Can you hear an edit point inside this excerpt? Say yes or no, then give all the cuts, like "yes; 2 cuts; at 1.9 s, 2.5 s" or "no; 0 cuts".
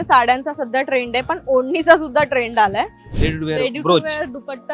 yes; 1 cut; at 3.0 s